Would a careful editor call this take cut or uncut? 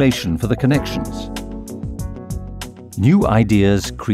cut